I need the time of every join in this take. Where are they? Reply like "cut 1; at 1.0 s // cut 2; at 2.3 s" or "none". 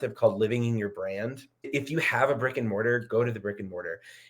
cut 1; at 1.7 s